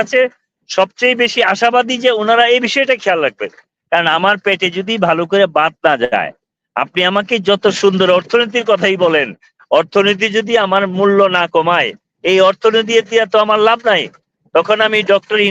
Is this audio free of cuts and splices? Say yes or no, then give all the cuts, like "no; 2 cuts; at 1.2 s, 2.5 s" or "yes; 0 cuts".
yes; 0 cuts